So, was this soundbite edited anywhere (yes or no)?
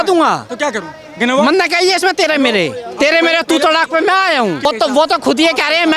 yes